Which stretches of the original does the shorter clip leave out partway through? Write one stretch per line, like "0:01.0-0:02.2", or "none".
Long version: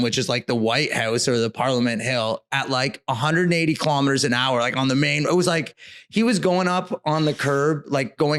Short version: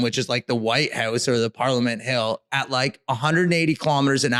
none